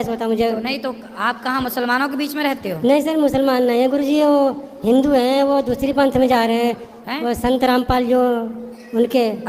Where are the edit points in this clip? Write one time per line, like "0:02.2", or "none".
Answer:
none